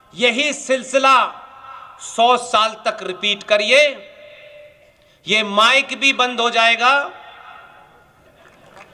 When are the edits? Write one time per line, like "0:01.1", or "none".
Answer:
none